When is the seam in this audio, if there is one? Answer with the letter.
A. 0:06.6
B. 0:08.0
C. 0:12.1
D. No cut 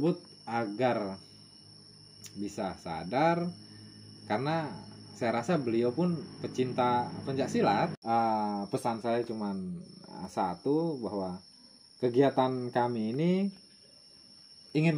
B